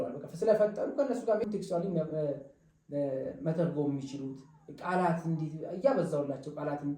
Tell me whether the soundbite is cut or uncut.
cut